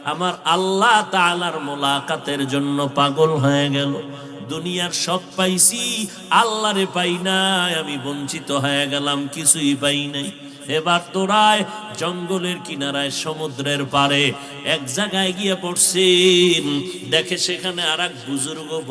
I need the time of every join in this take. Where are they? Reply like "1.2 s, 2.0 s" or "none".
none